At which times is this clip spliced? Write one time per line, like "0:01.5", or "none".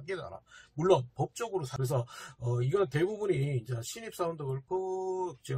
0:01.7

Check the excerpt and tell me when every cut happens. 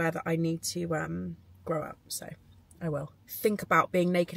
0:03.1

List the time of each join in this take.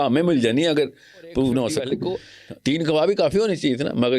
0:02.0

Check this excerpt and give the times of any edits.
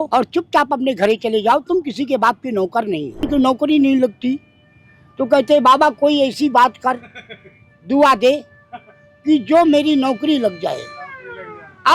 0:03.3

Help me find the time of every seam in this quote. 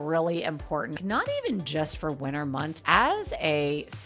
0:01.0
0:02.8

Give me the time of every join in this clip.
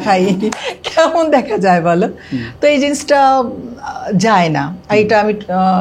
none

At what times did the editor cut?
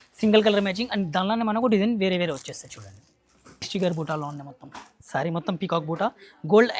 0:03.7

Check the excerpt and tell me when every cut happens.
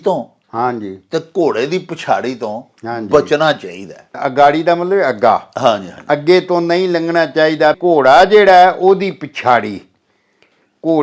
0:04.1
0:07.8

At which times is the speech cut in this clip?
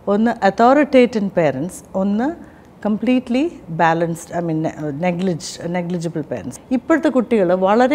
0:06.6

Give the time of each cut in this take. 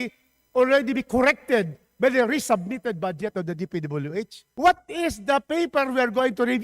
0:04.4

